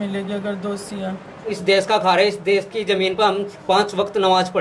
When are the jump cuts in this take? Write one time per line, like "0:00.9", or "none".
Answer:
0:01.6